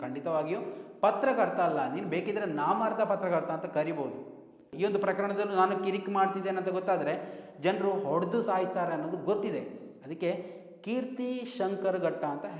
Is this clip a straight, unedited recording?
no; 1 cut; at 4.6 s

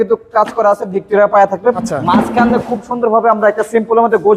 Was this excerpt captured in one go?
no; 1 cut; at 1.8 s

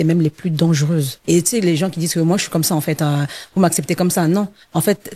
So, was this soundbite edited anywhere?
yes; 1 cut; at 1.2 s

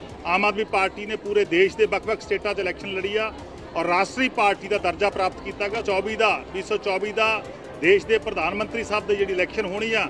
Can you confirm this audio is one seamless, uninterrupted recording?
no; 1 cut; at 5.8 s

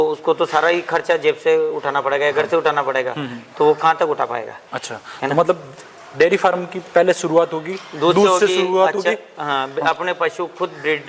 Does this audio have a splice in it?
no; 0 cuts

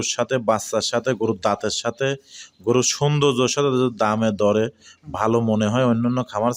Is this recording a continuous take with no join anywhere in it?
yes; 0 cuts

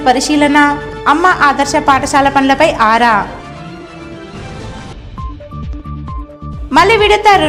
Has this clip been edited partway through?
no; 0 cuts

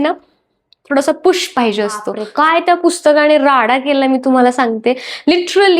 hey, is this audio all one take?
no; 1 cut; at 2.2 s

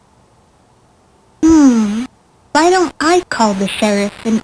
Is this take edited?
yes; 1 cut; at 1.4 s

